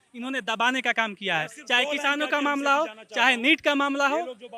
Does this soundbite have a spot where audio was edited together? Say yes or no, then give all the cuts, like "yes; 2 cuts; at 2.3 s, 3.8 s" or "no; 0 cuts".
no; 0 cuts